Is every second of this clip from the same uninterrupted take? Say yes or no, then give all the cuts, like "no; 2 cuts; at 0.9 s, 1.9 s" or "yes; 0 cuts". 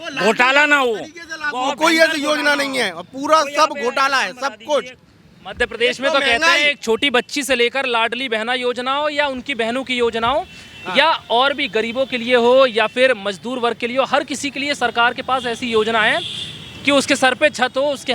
yes; 0 cuts